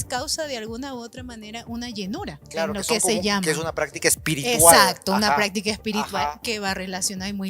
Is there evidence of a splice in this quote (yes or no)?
no